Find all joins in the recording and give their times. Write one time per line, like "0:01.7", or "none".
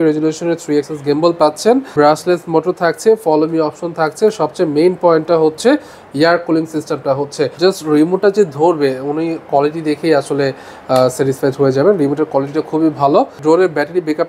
0:01.9
0:07.5
0:13.4